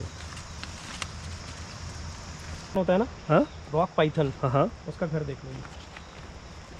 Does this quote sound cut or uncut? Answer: cut